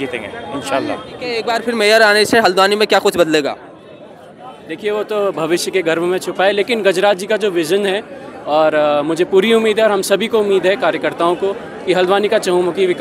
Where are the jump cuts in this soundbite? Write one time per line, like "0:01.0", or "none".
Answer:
0:01.4